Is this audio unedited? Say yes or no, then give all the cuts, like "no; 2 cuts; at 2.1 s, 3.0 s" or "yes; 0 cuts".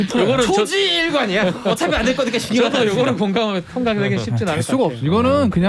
yes; 0 cuts